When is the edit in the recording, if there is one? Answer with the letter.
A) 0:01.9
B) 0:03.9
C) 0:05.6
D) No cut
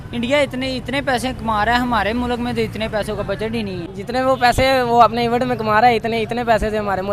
B